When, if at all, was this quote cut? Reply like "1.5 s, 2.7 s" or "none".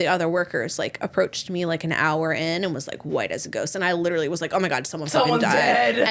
none